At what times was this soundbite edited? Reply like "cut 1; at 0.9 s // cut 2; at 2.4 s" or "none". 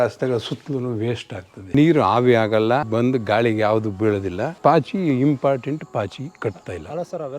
cut 1; at 1.7 s // cut 2; at 2.9 s // cut 3; at 4.5 s